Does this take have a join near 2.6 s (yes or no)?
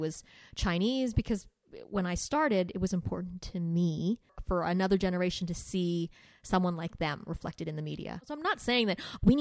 no